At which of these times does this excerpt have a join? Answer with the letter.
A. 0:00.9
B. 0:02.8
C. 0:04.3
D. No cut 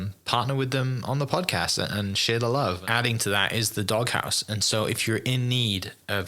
B